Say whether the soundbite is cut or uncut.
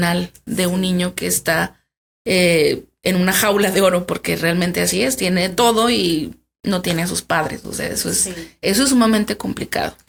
uncut